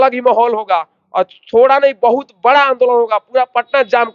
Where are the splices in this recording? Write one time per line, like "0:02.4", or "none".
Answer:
none